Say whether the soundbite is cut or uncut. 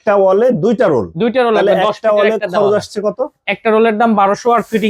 uncut